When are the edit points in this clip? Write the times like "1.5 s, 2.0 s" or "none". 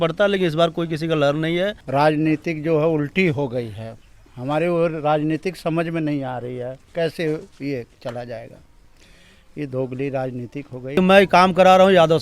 1.8 s, 11.0 s